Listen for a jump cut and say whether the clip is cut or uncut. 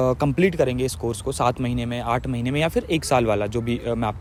uncut